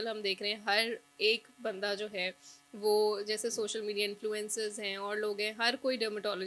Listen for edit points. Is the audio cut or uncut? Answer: uncut